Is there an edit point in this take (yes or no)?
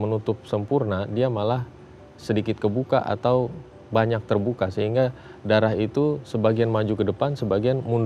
no